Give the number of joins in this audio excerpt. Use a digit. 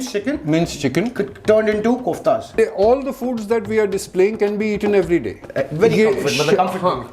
1